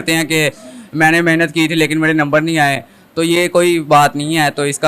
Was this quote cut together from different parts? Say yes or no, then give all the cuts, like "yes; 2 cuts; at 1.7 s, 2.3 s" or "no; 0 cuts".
no; 0 cuts